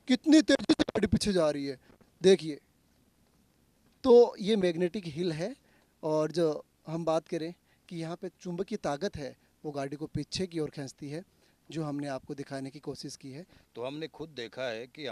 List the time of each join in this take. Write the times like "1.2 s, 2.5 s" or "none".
13.6 s